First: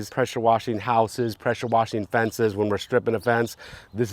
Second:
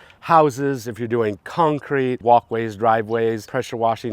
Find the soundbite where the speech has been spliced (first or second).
second